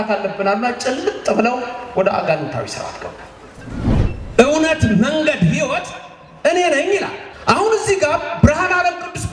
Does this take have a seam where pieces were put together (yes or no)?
yes